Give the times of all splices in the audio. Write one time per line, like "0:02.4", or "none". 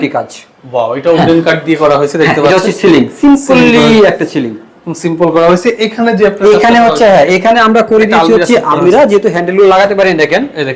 none